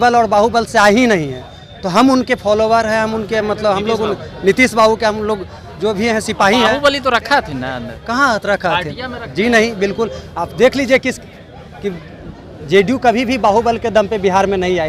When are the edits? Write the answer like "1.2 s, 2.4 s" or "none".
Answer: none